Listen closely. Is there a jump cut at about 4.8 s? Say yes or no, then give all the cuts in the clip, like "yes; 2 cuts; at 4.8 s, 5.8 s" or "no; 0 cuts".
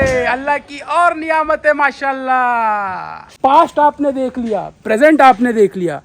no; 1 cut; at 3.3 s